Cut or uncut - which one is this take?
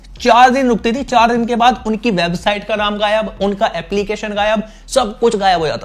uncut